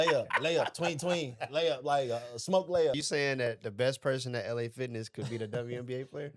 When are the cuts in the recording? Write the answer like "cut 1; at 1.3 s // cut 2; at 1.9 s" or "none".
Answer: cut 1; at 3.0 s